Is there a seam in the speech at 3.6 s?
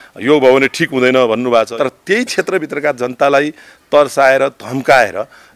no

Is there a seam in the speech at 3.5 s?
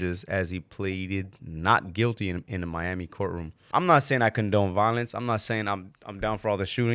yes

